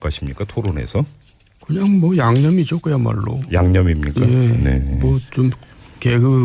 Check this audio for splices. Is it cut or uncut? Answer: uncut